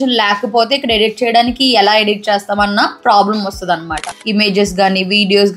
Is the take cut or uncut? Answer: cut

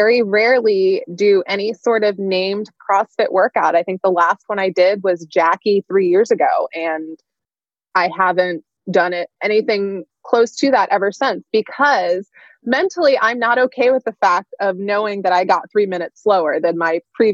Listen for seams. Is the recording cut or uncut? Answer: uncut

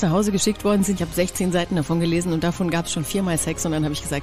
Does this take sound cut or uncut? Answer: cut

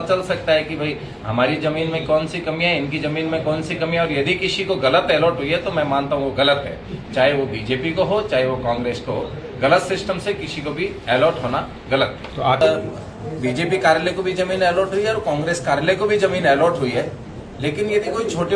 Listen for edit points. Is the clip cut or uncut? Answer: cut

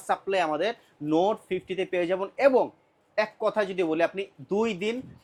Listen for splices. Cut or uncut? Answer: uncut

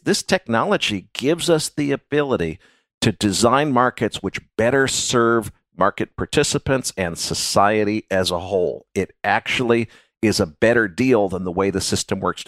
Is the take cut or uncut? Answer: uncut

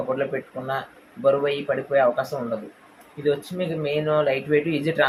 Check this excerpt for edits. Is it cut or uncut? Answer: uncut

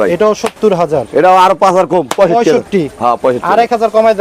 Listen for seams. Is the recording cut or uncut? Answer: uncut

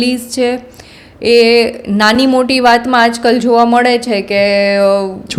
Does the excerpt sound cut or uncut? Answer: uncut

